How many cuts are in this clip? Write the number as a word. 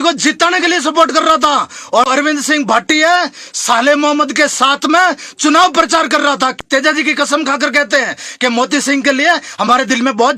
two